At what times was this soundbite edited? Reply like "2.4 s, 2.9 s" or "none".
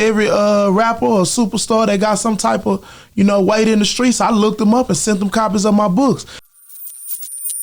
6.5 s